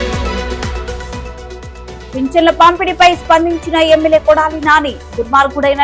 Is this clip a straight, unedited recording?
yes; 0 cuts

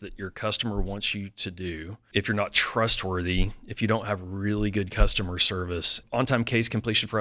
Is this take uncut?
no; 2 cuts; at 2.0 s, 6.0 s

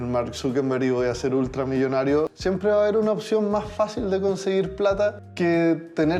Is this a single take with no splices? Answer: no; 2 cuts; at 2.3 s, 5.2 s

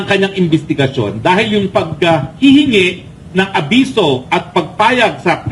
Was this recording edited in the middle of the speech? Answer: no; 0 cuts

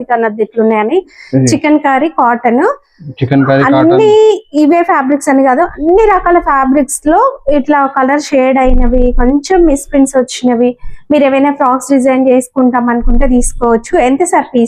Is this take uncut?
yes; 0 cuts

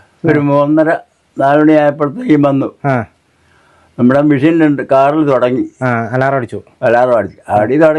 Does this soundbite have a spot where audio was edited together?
no; 0 cuts

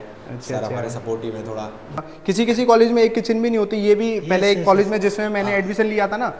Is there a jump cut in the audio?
yes; 1 cut; at 2.0 s

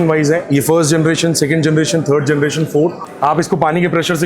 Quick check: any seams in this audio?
yes; 1 cut; at 3.1 s

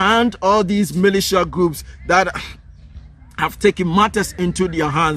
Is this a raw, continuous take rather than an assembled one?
yes; 0 cuts

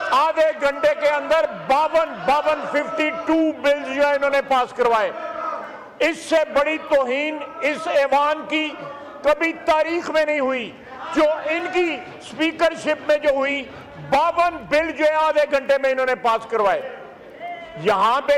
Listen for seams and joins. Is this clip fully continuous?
yes; 0 cuts

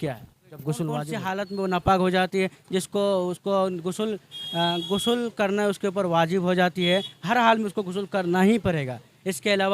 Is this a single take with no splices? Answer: no; 1 cut; at 1.1 s

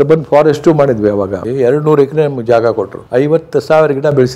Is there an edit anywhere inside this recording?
yes; 2 cuts; at 1.4 s, 2.9 s

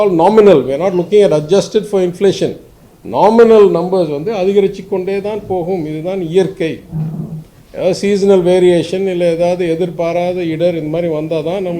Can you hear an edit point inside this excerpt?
no; 0 cuts

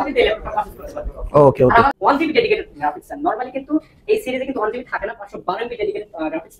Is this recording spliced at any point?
yes; 1 cut; at 2.0 s

